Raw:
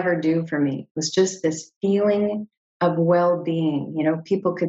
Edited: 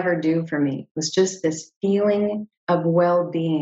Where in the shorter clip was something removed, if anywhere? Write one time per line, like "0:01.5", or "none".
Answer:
0:02.5